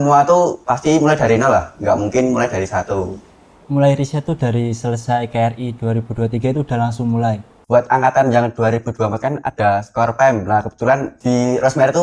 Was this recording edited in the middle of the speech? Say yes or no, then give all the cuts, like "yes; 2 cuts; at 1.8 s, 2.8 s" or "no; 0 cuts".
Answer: yes; 2 cuts; at 3.6 s, 7.5 s